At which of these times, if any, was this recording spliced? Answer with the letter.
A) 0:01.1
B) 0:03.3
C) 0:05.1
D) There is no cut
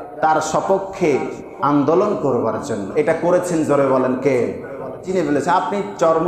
C